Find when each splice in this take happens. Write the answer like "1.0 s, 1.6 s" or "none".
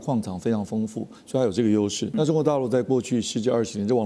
2.0 s